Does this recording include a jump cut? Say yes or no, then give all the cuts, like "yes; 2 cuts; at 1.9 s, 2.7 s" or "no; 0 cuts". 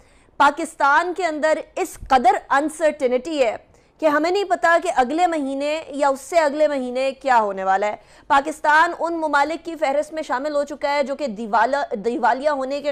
no; 0 cuts